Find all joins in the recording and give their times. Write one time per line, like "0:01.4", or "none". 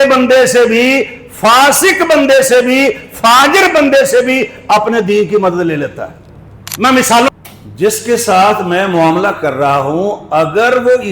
0:07.3